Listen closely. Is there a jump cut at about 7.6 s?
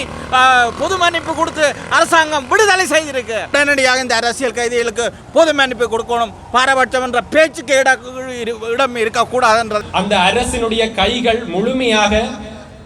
no; 2 cuts; at 3.5 s, 9.8 s

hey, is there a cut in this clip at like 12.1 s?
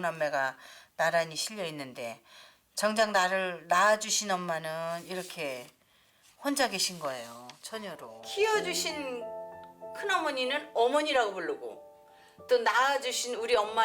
no; 1 cut; at 8.2 s

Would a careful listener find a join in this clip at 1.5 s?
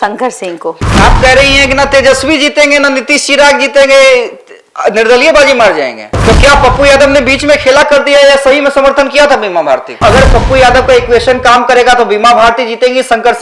no; 2 cuts; at 6.0 s, 10.0 s

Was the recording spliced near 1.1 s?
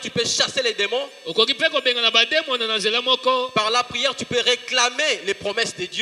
no; 0 cuts

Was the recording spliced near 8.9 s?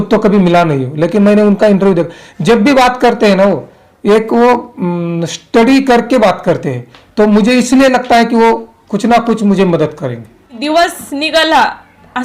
no; 1 cut; at 10.5 s

